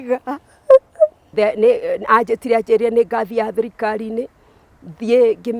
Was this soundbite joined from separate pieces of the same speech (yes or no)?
yes